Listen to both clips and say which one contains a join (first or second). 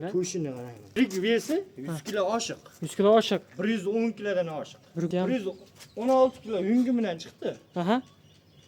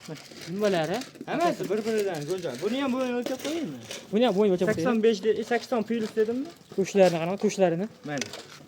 first